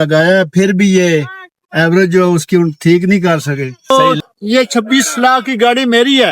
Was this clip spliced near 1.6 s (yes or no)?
no